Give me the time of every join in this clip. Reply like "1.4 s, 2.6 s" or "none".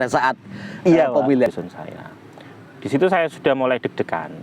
1.5 s